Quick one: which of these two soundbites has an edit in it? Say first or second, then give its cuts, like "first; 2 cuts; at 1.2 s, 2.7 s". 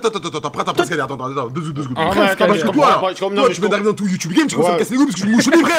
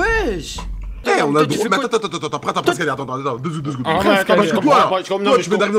second; 1 cut; at 1.0 s